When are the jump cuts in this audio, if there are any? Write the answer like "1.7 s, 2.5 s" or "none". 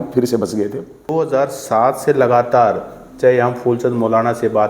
1.1 s